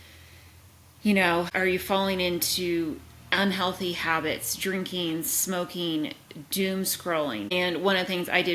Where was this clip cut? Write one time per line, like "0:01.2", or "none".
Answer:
0:01.5
0:07.5